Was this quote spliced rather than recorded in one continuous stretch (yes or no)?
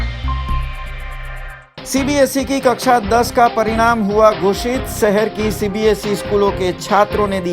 yes